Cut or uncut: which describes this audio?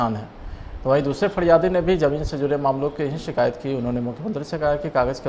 uncut